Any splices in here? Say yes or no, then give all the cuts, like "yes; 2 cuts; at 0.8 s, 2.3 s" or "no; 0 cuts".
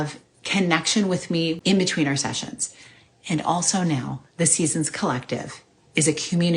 yes; 1 cut; at 1.6 s